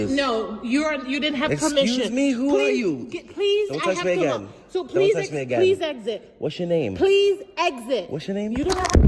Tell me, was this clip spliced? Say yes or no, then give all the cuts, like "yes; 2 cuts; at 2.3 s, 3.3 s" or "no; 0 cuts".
no; 0 cuts